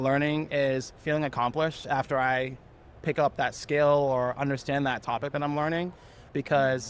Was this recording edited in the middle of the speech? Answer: no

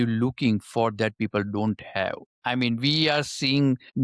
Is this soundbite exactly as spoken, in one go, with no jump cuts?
yes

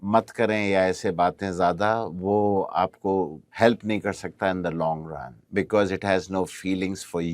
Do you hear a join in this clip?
yes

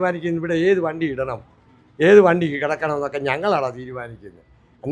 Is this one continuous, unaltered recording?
yes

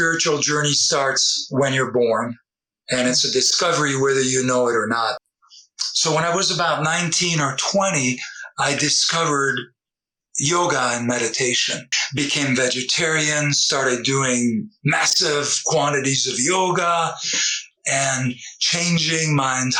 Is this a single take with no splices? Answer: yes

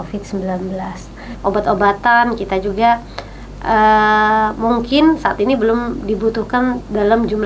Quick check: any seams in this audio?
yes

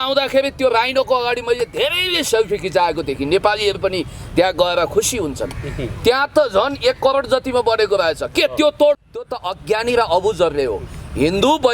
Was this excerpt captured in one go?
no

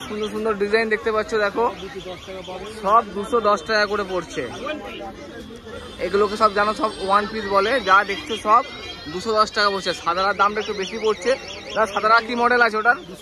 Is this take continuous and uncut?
yes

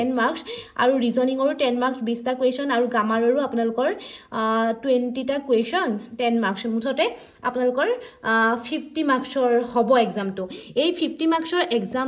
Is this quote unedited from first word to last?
yes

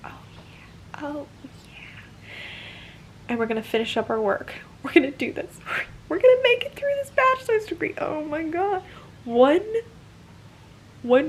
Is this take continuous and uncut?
yes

